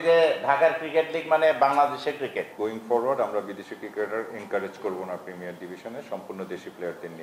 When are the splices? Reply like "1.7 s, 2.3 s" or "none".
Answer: 2.5 s

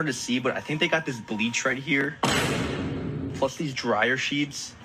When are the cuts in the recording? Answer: none

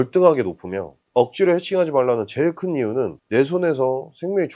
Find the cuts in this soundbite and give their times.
3.2 s

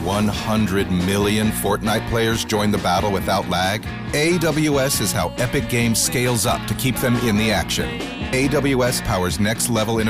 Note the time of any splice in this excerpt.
none

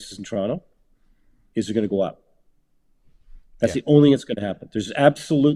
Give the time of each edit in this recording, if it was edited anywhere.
none

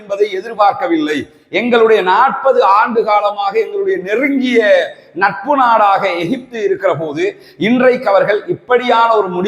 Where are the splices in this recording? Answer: none

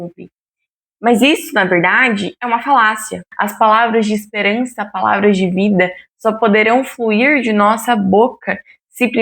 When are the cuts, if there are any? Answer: 3.3 s

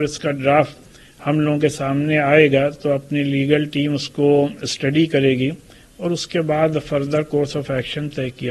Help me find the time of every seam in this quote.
none

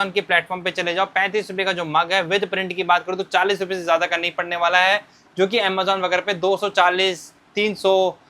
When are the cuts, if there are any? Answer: none

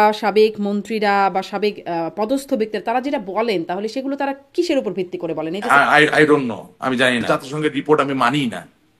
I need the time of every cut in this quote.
5.6 s, 7.2 s

